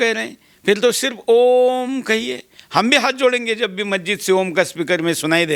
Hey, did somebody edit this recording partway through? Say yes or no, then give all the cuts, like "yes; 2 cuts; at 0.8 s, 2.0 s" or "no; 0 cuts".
no; 0 cuts